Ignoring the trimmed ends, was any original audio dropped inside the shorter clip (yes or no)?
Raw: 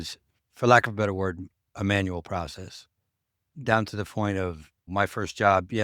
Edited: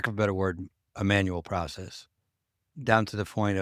no